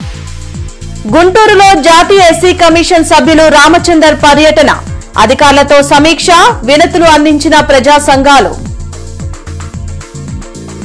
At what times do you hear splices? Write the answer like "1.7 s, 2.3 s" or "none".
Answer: none